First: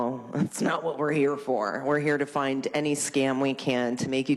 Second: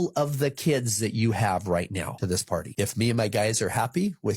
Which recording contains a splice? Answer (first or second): second